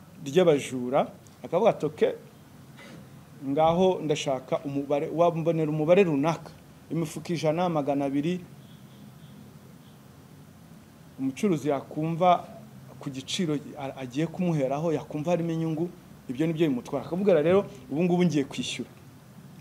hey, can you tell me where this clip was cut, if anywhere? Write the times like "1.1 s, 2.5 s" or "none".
1.3 s